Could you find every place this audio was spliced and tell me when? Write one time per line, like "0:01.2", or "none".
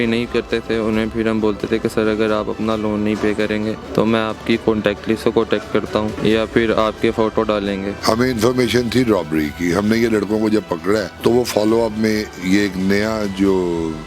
0:03.8
0:06.2
0:07.9
0:11.1

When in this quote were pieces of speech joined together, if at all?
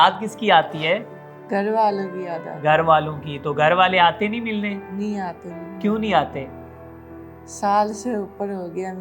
none

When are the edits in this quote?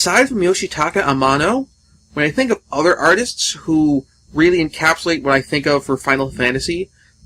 0:02.3

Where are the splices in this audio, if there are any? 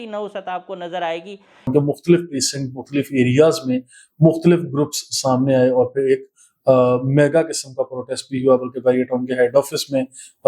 0:01.7

